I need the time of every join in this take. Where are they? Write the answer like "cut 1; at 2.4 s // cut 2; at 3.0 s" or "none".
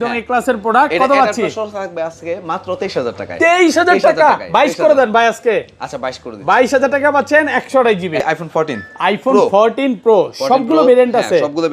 cut 1; at 8.2 s